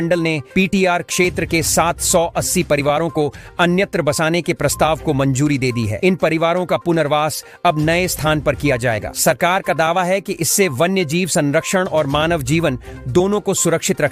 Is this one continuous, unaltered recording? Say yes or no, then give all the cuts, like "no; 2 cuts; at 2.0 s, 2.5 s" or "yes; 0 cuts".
yes; 0 cuts